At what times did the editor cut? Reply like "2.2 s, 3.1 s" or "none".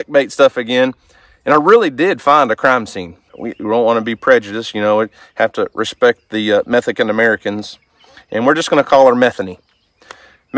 3.3 s